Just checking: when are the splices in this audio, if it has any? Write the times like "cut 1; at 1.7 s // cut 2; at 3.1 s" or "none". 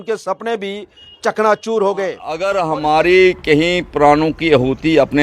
cut 1; at 2.3 s